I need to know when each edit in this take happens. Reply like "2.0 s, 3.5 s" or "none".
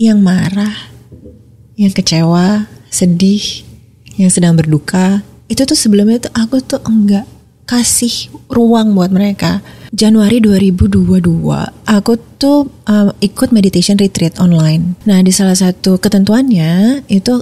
9.8 s, 11.7 s, 14.9 s